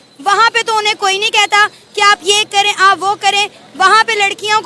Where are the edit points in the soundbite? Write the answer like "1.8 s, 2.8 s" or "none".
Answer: none